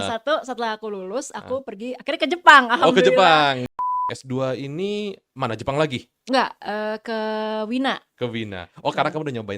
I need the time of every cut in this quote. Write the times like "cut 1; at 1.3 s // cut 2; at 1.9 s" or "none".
cut 1; at 3.6 s